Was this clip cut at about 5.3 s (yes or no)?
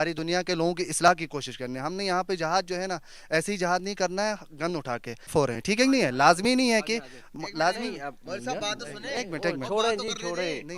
yes